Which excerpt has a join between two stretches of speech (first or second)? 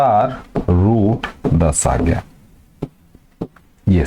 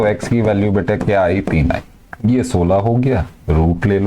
second